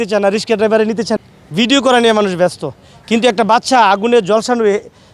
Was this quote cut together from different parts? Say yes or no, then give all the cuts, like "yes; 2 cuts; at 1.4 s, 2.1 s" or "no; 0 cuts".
yes; 1 cut; at 1.1 s